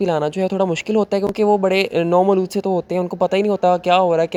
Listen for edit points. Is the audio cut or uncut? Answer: uncut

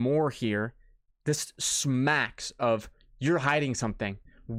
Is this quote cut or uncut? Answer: uncut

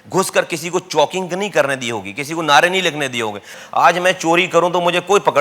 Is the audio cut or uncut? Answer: cut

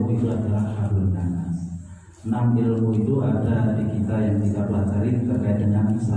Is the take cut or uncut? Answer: uncut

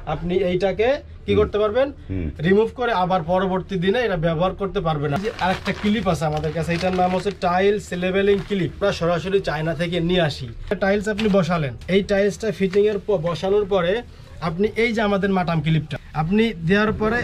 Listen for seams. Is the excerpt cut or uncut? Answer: cut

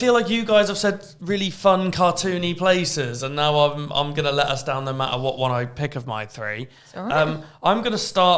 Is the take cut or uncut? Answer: uncut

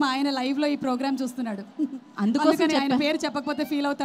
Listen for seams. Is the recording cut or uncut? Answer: uncut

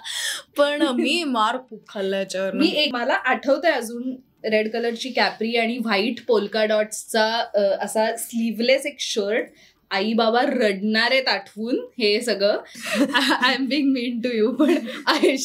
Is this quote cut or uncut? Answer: cut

